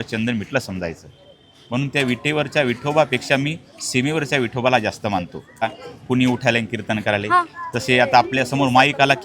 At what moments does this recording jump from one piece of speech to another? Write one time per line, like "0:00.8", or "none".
0:05.7